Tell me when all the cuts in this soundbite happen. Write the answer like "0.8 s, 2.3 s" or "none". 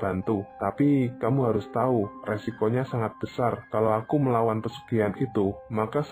none